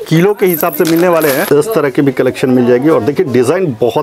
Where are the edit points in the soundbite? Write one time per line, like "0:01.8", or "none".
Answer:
0:01.4